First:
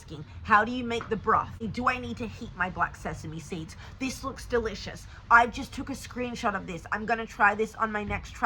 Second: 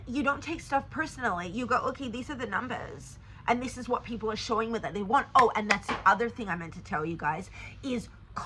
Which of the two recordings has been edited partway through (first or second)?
first